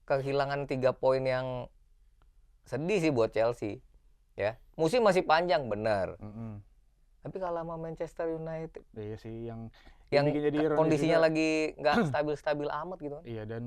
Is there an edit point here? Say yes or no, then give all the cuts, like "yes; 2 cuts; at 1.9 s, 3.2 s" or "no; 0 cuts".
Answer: no; 0 cuts